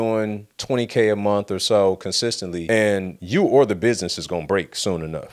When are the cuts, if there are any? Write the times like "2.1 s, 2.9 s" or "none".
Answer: none